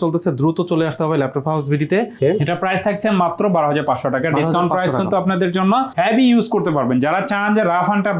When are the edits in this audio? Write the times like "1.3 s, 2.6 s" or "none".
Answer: 2.1 s, 5.9 s